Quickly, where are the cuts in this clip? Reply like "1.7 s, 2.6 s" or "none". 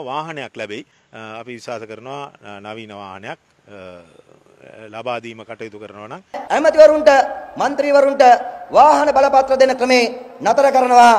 1.0 s, 6.4 s